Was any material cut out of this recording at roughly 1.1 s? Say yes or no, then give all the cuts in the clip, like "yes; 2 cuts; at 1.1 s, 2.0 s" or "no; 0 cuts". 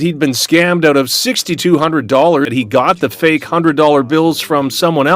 no; 1 cut; at 2.5 s